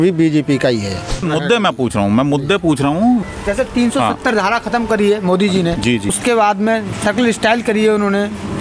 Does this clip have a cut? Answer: yes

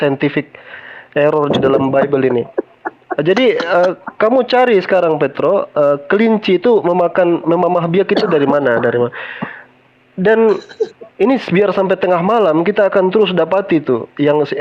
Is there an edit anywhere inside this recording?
no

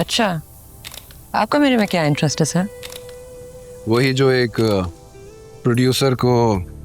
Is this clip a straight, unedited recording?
yes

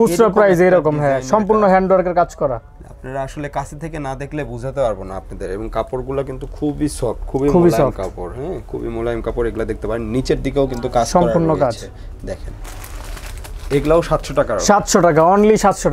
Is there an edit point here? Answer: no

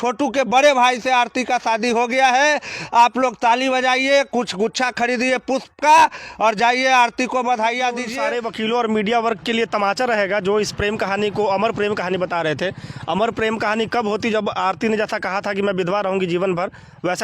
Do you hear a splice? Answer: yes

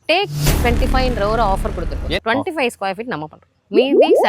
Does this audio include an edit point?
yes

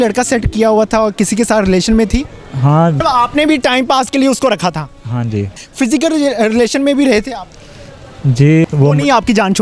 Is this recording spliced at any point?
yes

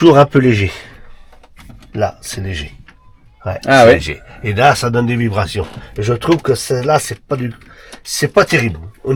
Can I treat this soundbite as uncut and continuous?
yes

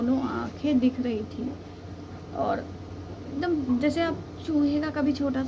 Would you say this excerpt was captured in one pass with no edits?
yes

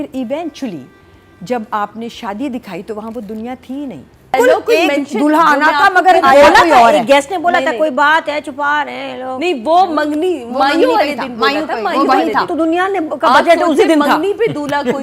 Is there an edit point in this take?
yes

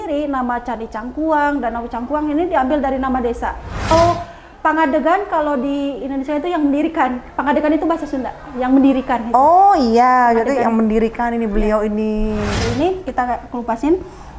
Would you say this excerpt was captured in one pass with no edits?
no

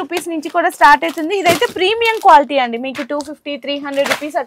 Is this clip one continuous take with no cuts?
yes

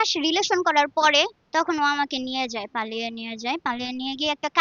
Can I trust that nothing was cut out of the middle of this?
no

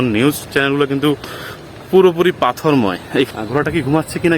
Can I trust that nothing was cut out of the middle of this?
no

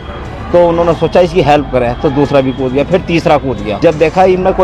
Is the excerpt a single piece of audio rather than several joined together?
no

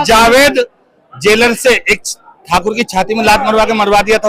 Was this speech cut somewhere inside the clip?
no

